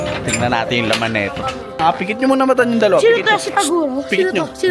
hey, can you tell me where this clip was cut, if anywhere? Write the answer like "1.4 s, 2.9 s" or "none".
1.8 s